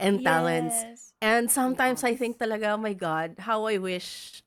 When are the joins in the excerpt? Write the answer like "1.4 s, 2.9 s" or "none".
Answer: none